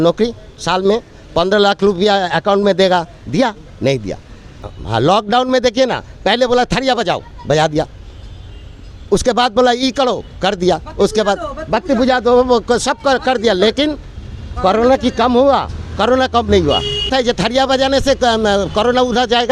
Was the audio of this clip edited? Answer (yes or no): yes